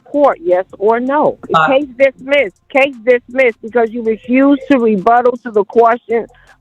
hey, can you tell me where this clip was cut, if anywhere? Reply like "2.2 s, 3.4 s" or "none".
1.4 s, 2.6 s